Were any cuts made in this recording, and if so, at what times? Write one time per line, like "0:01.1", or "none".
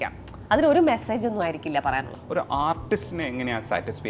0:02.2

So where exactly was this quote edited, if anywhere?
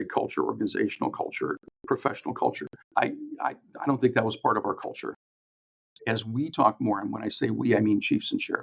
0:05.4

